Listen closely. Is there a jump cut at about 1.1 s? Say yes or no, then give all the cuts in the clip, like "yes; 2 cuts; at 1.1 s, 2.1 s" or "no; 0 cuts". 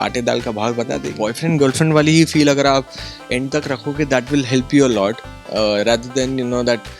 yes; 1 cut; at 1.1 s